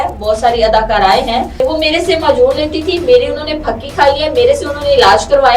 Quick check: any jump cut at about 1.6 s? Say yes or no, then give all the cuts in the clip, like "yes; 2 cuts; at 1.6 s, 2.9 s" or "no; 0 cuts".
yes; 1 cut; at 1.6 s